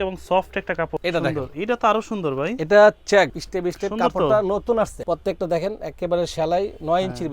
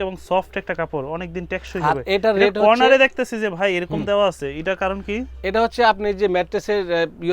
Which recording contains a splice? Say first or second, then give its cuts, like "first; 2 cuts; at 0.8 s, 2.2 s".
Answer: first; 3 cuts; at 0.9 s, 3.4 s, 5.0 s